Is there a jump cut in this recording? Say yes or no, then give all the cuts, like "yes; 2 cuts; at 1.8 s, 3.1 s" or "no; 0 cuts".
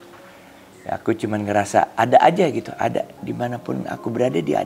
no; 0 cuts